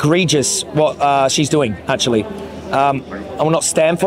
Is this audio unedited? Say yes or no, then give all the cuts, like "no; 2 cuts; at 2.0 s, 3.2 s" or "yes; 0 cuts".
yes; 0 cuts